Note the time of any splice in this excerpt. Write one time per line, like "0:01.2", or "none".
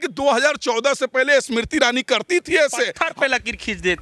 0:03.0